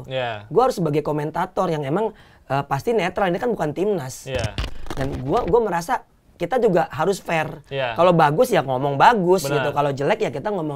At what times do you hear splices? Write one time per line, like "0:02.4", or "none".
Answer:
0:04.6